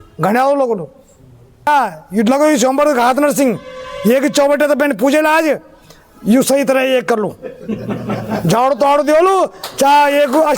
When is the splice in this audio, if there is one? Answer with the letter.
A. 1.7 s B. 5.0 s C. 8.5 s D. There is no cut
A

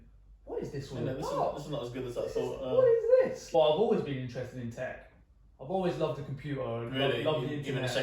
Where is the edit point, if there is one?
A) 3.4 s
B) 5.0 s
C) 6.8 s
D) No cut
A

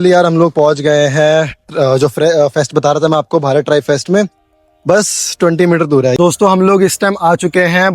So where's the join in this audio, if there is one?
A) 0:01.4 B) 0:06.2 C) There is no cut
B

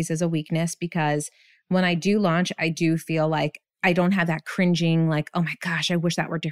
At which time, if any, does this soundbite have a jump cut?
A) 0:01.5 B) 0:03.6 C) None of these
B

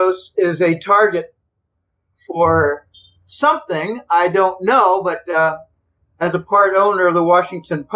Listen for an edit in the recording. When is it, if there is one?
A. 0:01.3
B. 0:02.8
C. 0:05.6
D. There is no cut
C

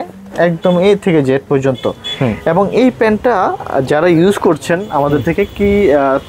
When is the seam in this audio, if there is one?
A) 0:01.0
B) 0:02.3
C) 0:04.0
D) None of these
D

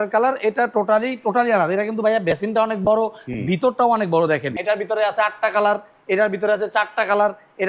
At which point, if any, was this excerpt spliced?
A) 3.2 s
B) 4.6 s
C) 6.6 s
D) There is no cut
B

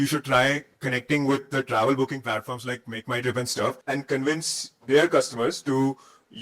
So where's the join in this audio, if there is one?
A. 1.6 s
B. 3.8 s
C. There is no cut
B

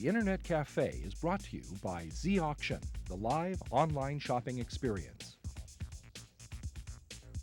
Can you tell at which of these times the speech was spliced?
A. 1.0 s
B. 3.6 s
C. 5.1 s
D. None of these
C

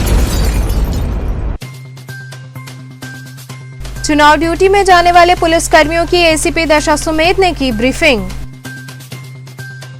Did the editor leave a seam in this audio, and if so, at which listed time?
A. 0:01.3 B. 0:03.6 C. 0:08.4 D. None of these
B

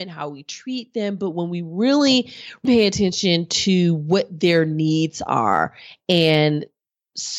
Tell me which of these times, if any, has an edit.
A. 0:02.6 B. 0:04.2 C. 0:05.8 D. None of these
A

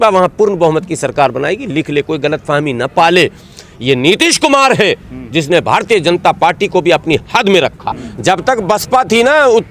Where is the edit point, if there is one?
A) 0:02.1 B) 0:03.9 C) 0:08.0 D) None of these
C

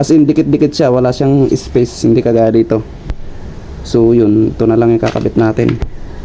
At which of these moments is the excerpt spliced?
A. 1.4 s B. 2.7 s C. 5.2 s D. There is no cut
D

